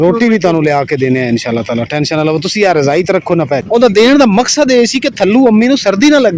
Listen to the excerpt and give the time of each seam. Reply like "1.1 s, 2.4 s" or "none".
3.5 s